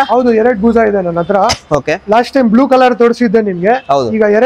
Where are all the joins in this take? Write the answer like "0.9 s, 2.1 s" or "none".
none